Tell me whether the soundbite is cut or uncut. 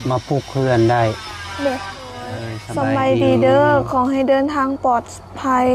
cut